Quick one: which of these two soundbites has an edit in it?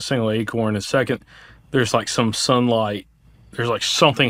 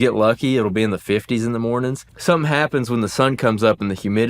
second; 1 cut; at 2.1 s

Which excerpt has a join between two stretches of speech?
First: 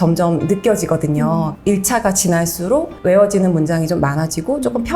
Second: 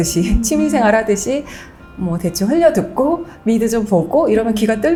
first; 2 cuts; at 1.5 s, 2.9 s

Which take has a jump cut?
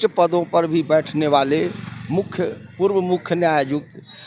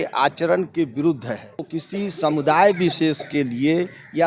second; 1 cut; at 1.8 s

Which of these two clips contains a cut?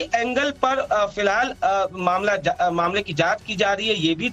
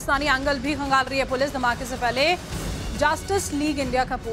second; 1 cut; at 1.6 s

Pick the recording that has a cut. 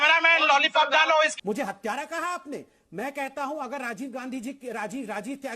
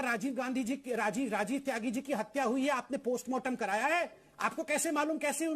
first; 2 cuts; at 0.9 s, 1.4 s

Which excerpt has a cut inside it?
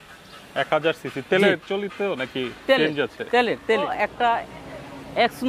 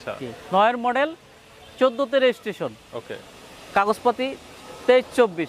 first; 1 cut; at 3.9 s

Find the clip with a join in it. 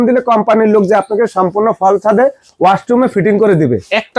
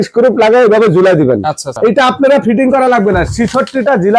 second; 1 cut; at 1.7 s

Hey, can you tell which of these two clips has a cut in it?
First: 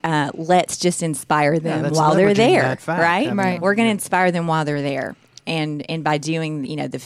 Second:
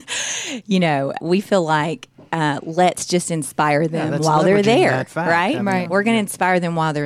second; 1 cut; at 1.2 s

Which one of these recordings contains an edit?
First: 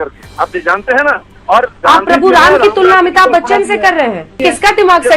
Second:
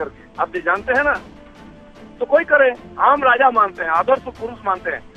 first; 2 cuts; at 1.3 s, 4.4 s

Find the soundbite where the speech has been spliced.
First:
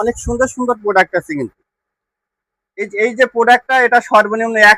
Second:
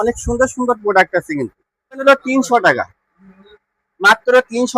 second; 1 cut; at 2.0 s

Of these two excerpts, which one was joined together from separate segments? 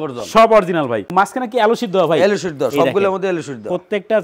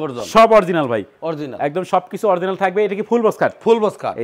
first; 1 cut; at 1.1 s

